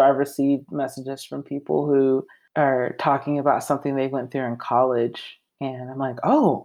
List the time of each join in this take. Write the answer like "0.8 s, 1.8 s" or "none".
2.4 s